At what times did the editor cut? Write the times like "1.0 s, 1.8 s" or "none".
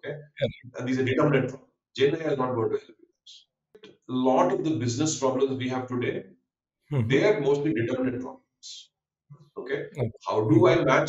3.9 s